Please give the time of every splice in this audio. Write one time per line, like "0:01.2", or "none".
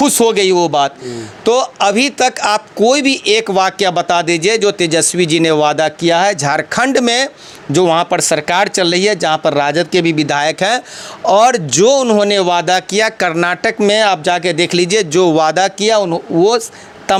none